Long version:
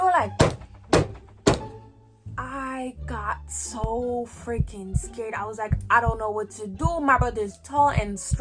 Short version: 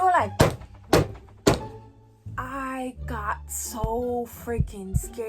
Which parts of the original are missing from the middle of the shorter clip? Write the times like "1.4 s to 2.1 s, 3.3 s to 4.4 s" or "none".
none